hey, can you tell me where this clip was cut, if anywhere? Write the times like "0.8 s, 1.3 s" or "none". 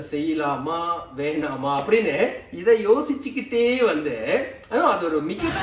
none

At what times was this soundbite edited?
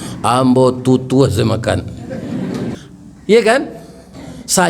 2.7 s

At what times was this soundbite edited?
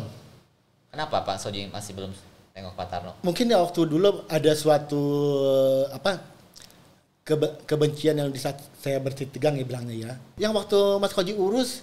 10.3 s

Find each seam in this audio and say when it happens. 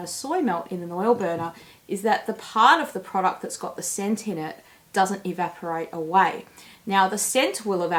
none

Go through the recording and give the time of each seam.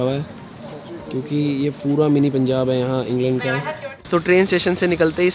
3.7 s

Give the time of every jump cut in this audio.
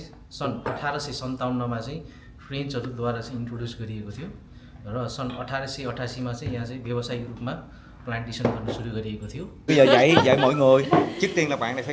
9.5 s

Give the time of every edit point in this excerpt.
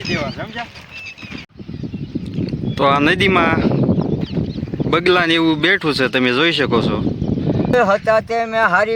1.4 s, 7.7 s

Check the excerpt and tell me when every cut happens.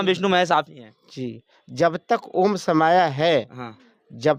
none

